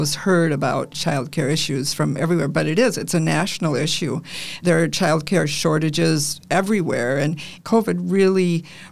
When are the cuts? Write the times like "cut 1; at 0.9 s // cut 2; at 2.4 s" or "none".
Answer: cut 1; at 0.9 s // cut 2; at 4.6 s // cut 3; at 7.5 s